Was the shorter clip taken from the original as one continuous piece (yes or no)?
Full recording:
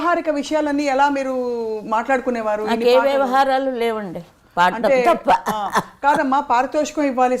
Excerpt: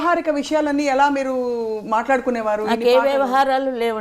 yes